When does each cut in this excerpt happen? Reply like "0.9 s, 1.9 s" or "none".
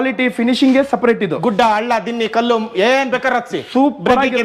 none